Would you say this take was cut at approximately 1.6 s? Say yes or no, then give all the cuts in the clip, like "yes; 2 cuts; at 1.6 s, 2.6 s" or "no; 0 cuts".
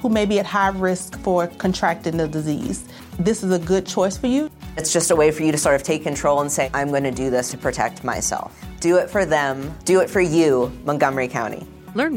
no; 0 cuts